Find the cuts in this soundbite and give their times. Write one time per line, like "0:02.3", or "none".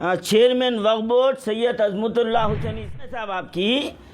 0:02.9